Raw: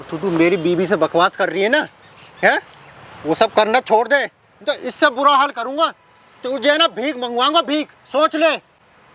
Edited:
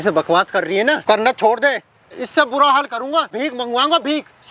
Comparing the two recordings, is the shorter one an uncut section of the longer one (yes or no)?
no